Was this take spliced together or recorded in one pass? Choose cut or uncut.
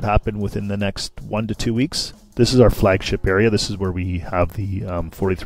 cut